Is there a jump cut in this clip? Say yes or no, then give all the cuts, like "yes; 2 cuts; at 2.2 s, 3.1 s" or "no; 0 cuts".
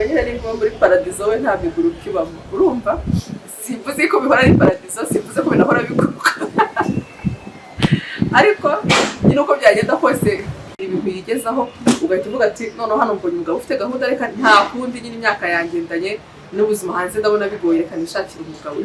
yes; 1 cut; at 10.8 s